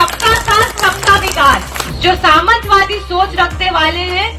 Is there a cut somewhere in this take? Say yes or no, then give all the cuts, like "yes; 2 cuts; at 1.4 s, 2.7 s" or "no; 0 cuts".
yes; 1 cut; at 1.8 s